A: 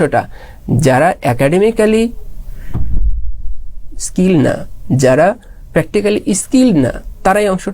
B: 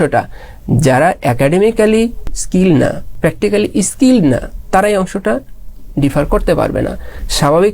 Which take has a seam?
B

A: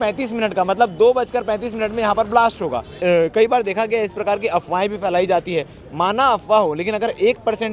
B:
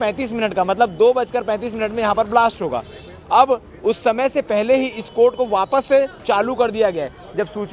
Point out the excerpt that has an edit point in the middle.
A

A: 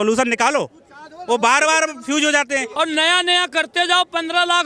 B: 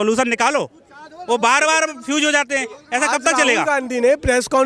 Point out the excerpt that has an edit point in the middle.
A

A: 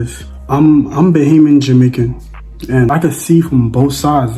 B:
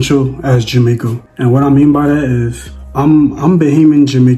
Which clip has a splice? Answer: A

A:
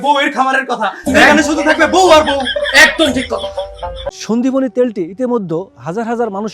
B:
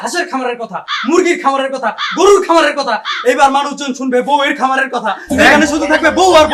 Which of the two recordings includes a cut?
A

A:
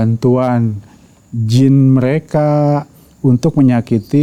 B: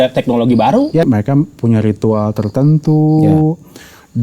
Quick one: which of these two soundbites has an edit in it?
B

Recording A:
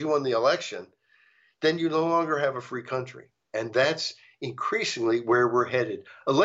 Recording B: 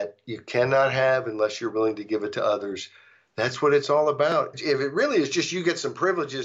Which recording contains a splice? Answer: B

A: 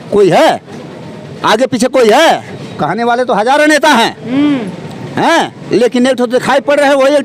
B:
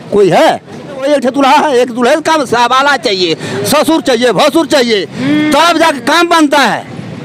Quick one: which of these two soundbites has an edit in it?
B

